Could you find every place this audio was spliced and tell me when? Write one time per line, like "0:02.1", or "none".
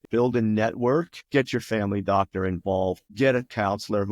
0:01.2